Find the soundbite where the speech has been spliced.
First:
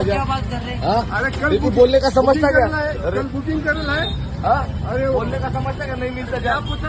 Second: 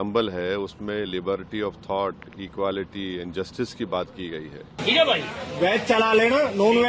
second; 1 cut; at 4.6 s

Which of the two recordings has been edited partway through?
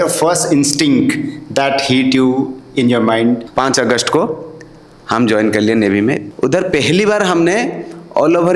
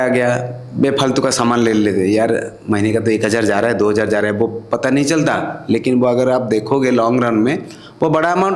first; 1 cut; at 3.5 s

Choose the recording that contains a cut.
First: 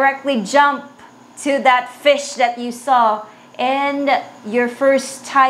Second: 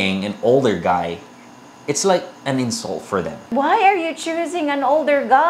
second; 1 cut; at 3.5 s

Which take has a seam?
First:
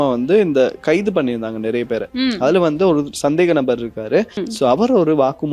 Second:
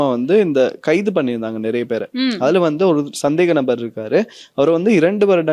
first; 1 cut; at 4.4 s

